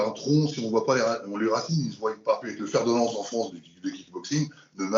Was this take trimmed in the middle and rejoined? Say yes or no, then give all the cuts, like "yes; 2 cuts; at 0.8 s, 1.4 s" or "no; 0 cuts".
yes; 1 cut; at 2.5 s